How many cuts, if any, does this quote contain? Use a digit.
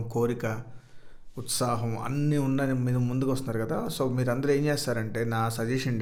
0